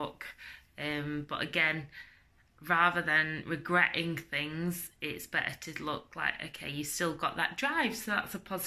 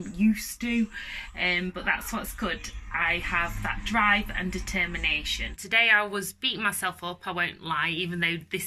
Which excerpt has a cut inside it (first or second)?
second